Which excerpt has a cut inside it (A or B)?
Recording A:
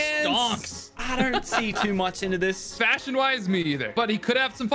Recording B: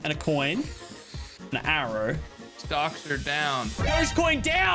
A